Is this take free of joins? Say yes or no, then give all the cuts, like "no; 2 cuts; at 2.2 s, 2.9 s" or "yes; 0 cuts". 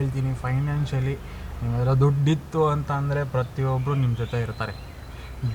yes; 0 cuts